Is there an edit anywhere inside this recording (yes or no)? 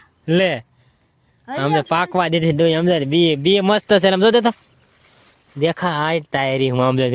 no